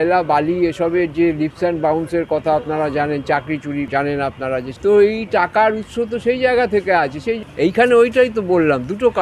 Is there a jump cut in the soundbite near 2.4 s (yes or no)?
no